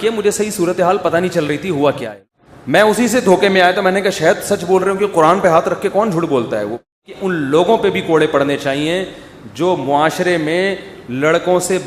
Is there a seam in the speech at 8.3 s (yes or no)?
no